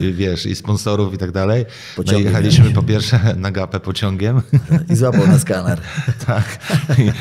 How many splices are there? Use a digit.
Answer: 0